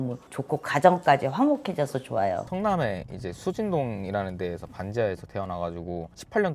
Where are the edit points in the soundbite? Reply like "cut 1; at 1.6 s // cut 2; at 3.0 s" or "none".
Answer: cut 1; at 2.5 s